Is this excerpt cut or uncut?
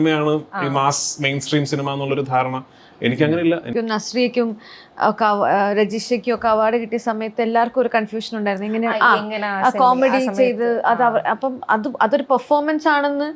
cut